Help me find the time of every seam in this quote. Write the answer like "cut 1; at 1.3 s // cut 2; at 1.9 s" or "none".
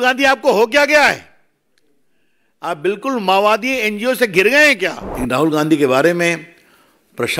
cut 1; at 5.1 s